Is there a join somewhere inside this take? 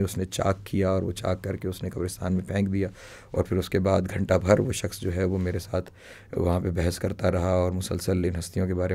no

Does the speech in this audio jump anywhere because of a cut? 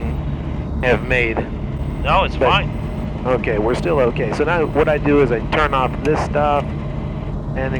no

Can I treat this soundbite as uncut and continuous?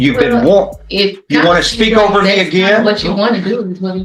yes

